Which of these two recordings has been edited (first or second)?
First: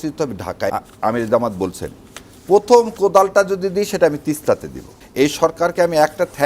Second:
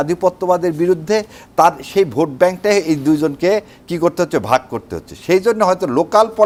first